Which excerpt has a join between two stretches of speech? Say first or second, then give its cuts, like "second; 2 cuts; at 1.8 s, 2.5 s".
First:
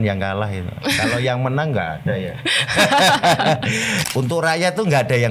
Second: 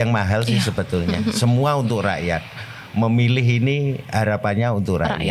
first; 1 cut; at 3.9 s